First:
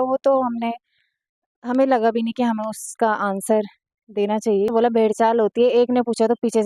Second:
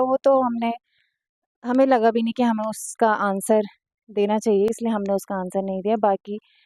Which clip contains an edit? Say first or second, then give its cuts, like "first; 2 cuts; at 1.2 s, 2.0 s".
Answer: first; 1 cut; at 4.7 s